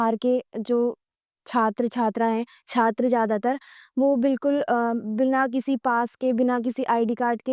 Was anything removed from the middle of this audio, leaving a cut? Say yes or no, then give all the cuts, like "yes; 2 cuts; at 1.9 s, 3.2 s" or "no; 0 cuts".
no; 0 cuts